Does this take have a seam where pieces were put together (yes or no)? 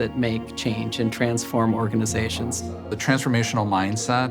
yes